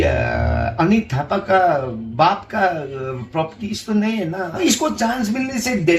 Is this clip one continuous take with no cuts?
no; 1 cut; at 4.6 s

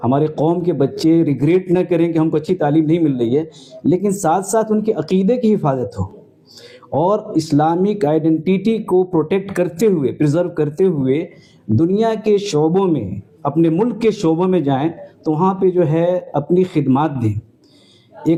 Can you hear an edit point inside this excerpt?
no; 0 cuts

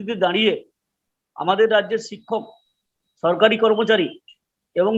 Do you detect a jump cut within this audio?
no; 0 cuts

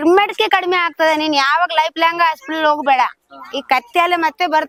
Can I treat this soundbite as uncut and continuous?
yes; 0 cuts

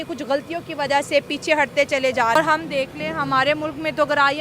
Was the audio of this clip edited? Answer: yes; 1 cut; at 2.4 s

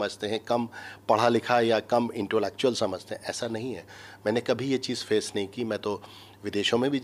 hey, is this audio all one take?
yes; 0 cuts

